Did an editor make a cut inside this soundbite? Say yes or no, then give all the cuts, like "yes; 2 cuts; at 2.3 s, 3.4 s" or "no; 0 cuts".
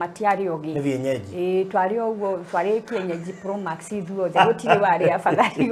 no; 0 cuts